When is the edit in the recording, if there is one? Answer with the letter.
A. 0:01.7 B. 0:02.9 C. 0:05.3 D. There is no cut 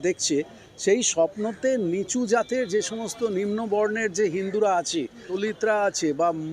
C